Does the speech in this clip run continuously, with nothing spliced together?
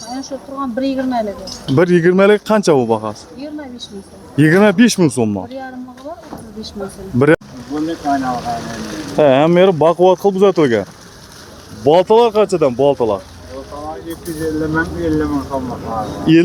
no; 1 cut; at 7.3 s

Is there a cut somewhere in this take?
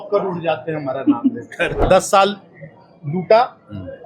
yes; 1 cut; at 1.8 s

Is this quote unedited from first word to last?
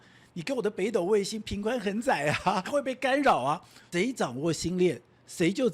no; 2 cuts; at 2.7 s, 3.8 s

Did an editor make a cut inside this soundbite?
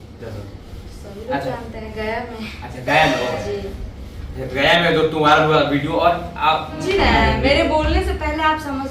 yes; 1 cut; at 6.8 s

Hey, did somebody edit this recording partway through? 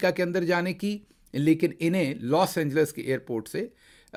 no; 0 cuts

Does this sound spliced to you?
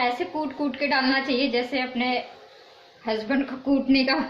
no; 0 cuts

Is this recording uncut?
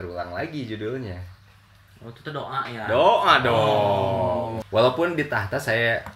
no; 1 cut; at 4.6 s

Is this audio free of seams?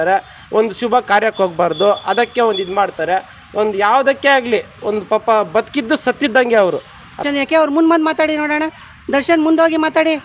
no; 1 cut; at 7.2 s

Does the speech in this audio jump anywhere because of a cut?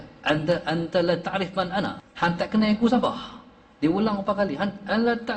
yes; 1 cut; at 2.0 s

